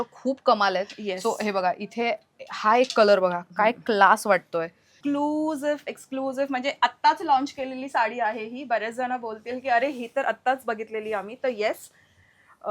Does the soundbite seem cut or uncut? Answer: cut